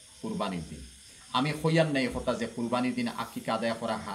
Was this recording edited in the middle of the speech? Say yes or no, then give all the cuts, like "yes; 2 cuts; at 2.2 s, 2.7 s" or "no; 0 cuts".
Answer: no; 0 cuts